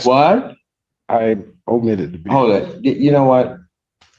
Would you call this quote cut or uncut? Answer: uncut